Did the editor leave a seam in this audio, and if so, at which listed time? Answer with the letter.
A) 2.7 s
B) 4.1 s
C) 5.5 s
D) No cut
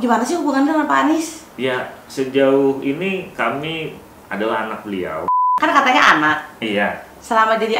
C